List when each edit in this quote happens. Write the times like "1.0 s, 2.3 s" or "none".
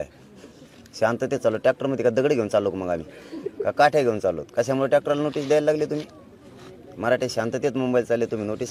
none